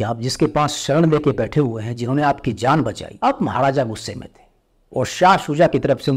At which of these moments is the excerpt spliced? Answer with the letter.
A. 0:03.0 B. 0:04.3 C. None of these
A